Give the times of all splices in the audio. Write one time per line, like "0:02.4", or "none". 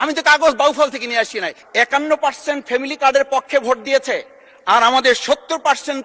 0:01.5